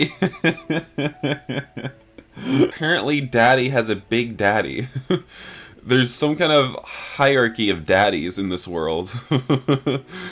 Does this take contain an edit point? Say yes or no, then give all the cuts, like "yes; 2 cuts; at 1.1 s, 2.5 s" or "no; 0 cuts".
yes; 1 cut; at 2.8 s